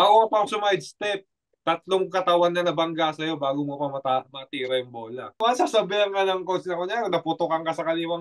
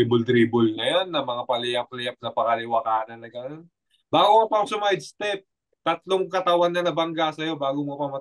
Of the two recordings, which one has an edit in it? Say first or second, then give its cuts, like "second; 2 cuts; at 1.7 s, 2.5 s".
first; 1 cut; at 5.4 s